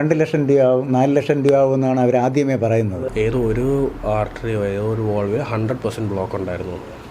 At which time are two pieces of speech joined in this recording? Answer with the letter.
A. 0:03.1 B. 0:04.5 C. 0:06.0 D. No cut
A